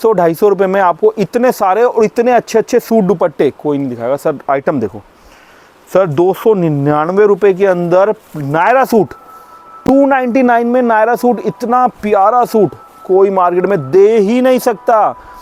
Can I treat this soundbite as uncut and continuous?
yes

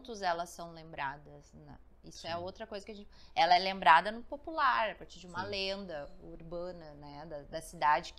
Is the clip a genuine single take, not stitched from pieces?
yes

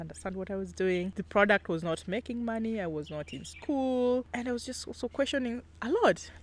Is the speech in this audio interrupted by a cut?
no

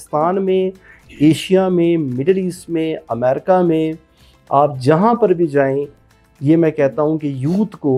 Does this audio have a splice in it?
no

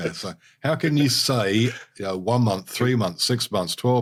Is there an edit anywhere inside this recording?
no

